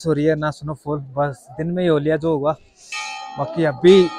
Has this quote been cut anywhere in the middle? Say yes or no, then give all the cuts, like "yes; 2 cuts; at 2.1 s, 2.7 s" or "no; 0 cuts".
no; 0 cuts